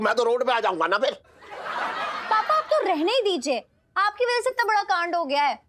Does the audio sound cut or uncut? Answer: uncut